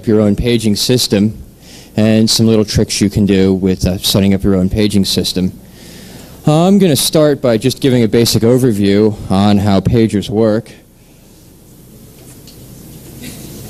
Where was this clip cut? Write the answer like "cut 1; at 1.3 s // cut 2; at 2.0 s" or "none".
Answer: none